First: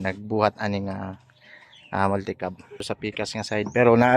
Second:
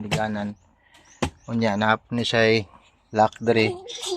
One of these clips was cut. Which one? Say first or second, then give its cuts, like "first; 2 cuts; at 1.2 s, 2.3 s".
first; 1 cut; at 2.9 s